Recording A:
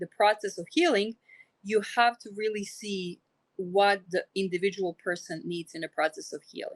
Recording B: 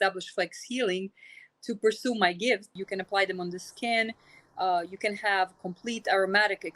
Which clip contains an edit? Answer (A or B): B